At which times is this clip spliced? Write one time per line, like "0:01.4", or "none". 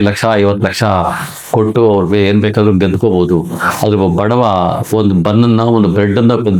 none